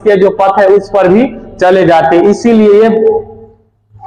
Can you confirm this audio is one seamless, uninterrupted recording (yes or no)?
yes